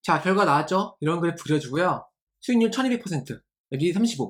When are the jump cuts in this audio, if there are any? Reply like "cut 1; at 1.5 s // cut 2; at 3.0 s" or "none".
none